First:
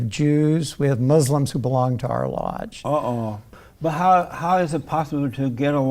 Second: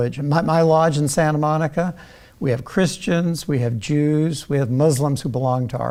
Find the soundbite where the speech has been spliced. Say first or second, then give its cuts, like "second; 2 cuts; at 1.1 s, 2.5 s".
first; 1 cut; at 3.5 s